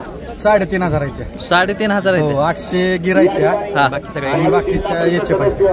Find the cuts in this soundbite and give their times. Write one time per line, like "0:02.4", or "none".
none